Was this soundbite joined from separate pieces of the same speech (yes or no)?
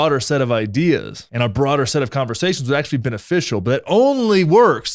no